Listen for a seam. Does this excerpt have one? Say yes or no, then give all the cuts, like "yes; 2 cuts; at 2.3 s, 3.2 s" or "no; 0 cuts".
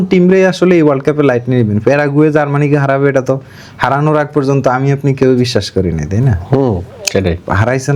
no; 0 cuts